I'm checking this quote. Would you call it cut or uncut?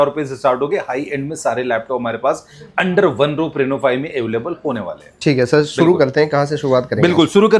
uncut